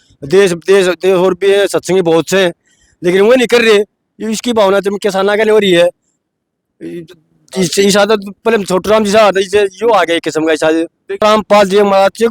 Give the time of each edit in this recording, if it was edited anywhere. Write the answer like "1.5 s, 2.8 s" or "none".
11.2 s

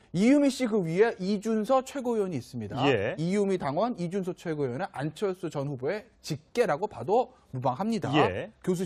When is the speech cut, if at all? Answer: none

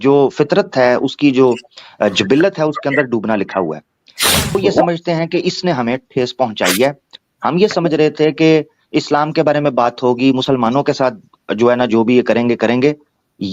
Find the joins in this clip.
4.5 s

